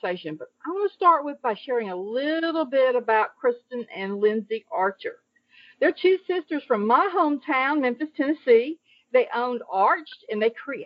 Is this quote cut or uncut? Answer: uncut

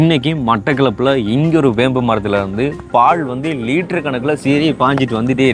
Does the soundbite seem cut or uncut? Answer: uncut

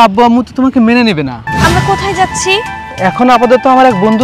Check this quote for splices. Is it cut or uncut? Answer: cut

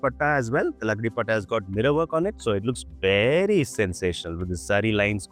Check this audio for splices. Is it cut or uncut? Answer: uncut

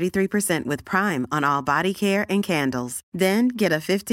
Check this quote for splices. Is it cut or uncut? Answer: uncut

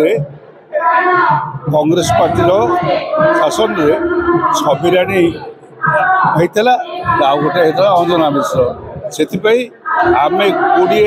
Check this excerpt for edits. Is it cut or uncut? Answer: uncut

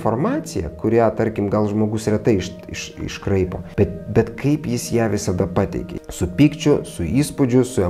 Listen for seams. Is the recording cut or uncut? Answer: cut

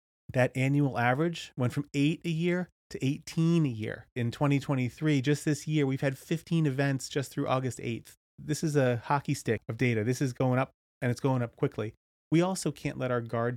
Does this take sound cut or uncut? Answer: cut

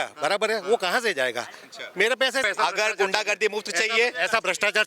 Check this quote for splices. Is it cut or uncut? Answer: cut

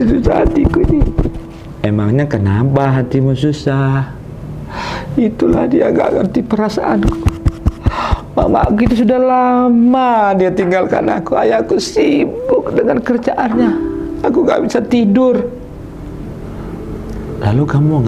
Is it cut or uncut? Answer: uncut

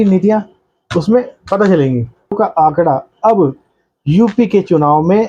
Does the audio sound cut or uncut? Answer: cut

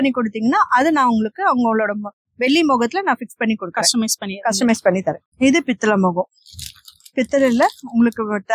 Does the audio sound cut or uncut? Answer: uncut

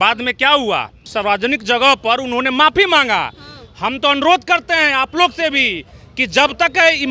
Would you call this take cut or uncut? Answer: cut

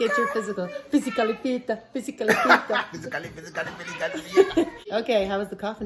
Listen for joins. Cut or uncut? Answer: cut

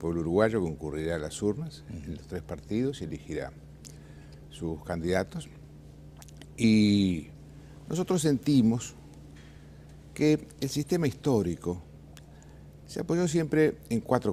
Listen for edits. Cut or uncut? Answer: uncut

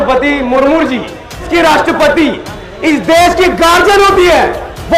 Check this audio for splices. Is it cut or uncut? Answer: cut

